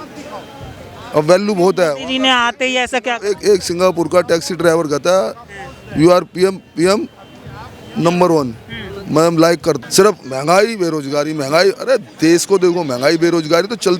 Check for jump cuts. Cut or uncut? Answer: cut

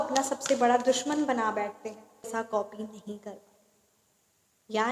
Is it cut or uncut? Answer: cut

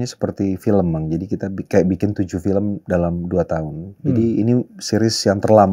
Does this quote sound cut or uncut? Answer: cut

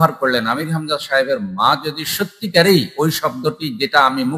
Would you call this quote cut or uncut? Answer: uncut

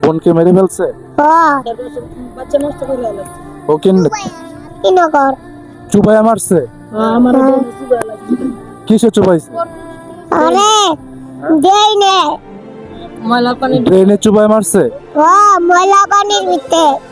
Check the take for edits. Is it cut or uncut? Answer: uncut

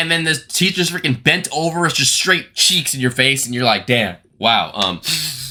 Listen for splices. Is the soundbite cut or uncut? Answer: uncut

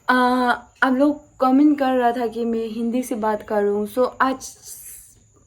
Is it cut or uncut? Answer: uncut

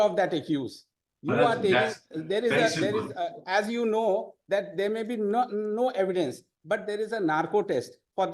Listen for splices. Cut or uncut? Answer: uncut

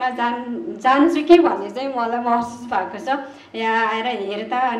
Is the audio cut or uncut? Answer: uncut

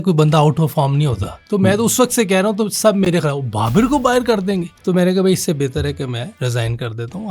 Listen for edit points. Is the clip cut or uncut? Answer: cut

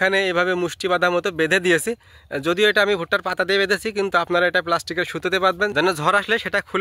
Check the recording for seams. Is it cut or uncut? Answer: cut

